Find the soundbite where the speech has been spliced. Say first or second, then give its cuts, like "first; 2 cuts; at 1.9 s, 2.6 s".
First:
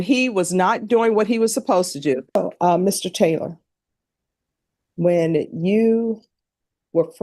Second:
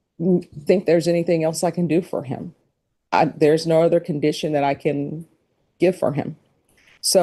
first; 1 cut; at 2.4 s